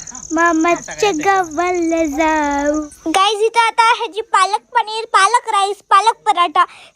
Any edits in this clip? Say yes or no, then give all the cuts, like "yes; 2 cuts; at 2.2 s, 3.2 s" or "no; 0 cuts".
yes; 1 cut; at 2.8 s